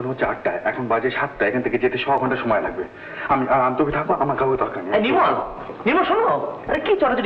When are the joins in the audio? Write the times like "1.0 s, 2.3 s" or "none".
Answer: none